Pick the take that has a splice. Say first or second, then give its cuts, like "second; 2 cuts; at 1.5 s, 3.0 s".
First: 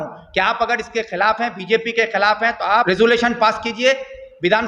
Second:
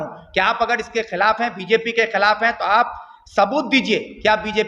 first; 1 cut; at 2.9 s